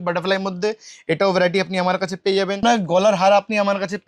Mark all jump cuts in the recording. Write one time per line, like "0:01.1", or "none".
0:02.6